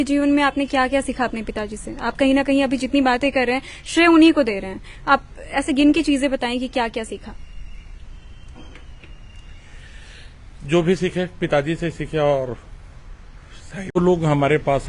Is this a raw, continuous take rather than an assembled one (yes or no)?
no